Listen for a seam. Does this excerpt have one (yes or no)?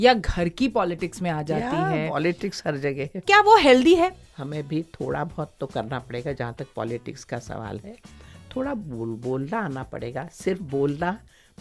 yes